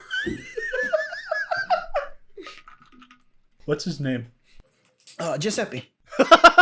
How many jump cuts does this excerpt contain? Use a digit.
1